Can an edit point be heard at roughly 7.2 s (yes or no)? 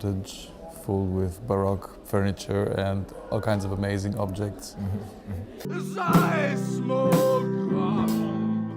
no